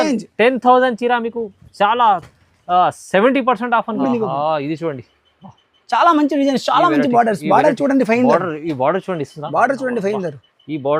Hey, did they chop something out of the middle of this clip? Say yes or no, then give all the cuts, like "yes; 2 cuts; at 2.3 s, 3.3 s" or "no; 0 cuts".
yes; 1 cut; at 4.0 s